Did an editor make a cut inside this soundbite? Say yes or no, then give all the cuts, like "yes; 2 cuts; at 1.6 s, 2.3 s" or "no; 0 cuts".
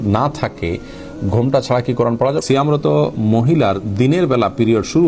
yes; 1 cut; at 2.4 s